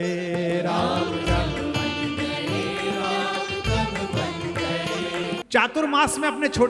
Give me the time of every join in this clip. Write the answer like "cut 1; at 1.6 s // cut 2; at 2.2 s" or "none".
cut 1; at 5.4 s